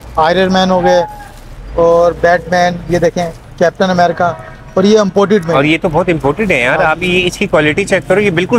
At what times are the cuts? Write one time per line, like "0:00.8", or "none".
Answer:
none